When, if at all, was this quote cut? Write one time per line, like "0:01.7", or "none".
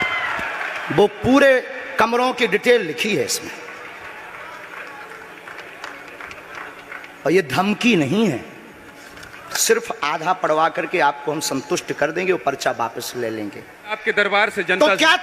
0:14.0